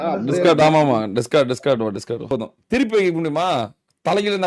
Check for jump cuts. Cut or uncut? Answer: cut